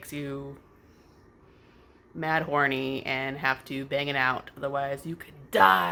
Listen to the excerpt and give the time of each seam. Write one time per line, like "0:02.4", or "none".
none